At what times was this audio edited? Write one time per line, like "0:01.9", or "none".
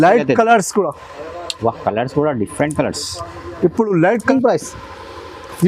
0:04.3

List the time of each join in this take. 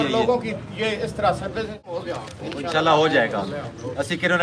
0:01.9

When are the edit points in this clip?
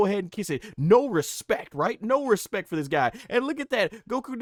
none

